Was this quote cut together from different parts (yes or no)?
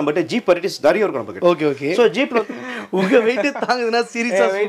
yes